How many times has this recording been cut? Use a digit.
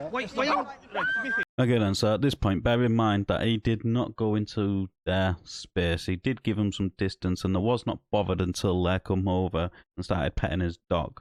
0